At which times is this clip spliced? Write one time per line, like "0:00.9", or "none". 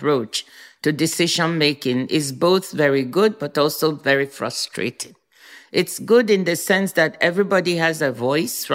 none